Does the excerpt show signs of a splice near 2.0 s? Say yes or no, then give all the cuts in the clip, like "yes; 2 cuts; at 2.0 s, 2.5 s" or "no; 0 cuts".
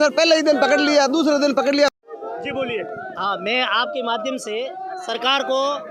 no; 0 cuts